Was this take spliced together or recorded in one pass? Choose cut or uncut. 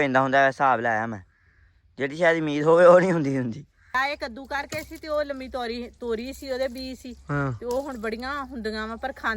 cut